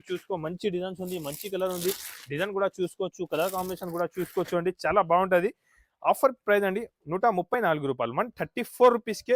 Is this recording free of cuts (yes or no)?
yes